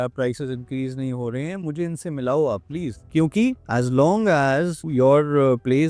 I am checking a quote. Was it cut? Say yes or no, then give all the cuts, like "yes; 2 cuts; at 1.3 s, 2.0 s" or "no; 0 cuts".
no; 0 cuts